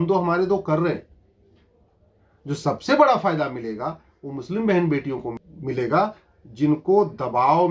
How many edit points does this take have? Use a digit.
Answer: 1